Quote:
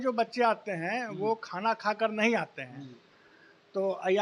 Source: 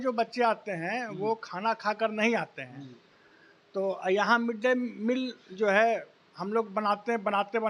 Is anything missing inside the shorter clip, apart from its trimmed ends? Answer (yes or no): no